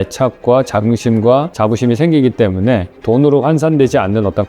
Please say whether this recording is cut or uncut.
cut